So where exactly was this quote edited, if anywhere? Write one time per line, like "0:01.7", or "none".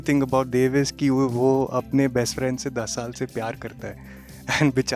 none